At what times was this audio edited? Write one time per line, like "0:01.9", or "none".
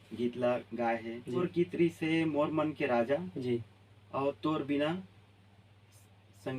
0:01.4